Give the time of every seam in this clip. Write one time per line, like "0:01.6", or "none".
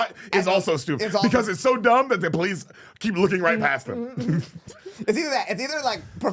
0:04.6